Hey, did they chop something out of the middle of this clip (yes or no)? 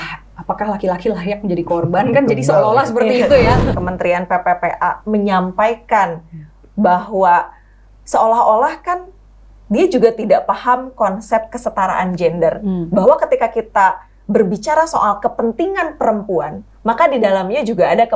yes